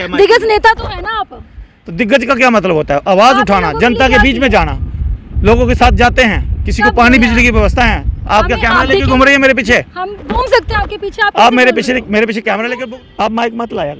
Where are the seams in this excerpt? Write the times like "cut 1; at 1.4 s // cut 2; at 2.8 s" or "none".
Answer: cut 1; at 12.7 s